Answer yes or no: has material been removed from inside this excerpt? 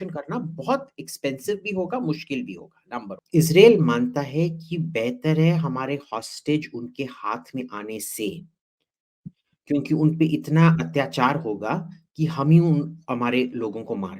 yes